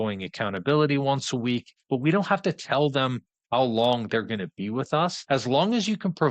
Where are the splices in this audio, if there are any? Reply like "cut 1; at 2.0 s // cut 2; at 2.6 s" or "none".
cut 1; at 1.8 s // cut 2; at 5.2 s